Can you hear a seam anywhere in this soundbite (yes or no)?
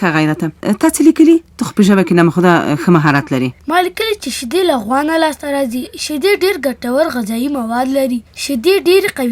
no